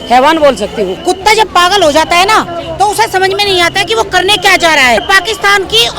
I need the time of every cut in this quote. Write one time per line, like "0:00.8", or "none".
0:01.0
0:05.0